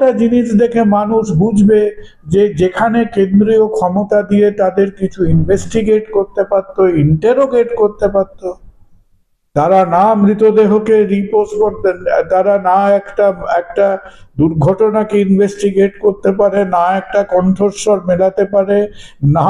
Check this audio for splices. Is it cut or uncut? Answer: uncut